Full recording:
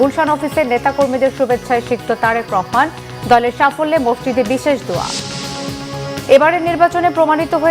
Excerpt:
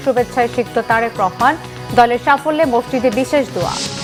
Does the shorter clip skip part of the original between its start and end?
no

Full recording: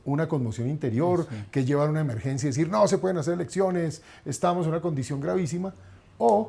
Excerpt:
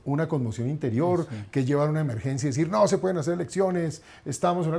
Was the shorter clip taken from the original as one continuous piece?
yes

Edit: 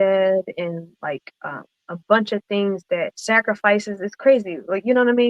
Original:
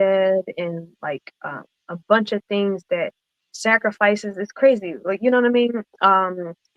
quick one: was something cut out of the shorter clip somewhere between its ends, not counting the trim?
yes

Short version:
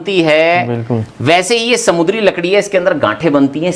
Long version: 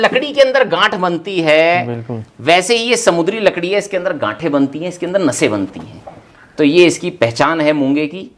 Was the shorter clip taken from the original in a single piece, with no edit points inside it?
yes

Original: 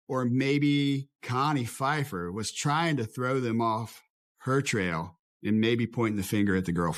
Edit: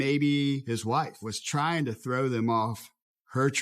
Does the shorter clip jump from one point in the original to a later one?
yes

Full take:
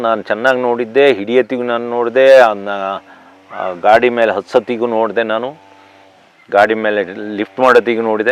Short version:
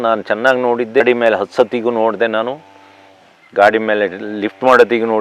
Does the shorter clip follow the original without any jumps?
no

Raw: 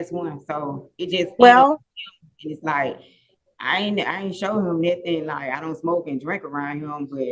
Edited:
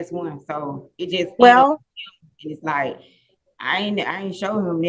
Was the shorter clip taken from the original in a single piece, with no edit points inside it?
yes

